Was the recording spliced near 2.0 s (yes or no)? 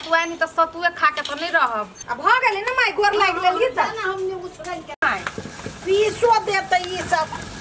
yes